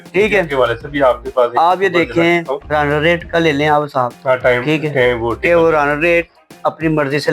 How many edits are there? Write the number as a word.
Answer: two